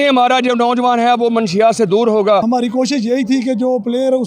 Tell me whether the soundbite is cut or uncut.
cut